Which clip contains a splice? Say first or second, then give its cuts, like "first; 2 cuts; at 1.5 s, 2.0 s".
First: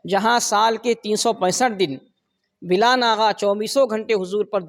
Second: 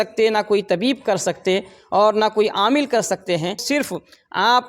second; 1 cut; at 3.6 s